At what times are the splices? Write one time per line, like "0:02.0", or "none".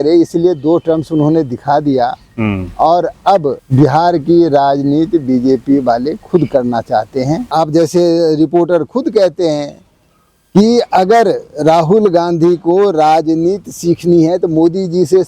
0:03.6
0:07.4